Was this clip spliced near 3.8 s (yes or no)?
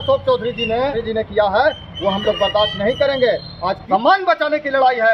yes